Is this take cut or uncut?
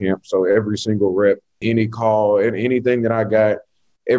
cut